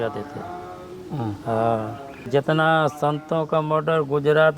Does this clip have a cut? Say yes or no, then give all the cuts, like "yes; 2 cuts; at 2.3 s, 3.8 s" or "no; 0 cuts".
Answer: yes; 1 cut; at 2.3 s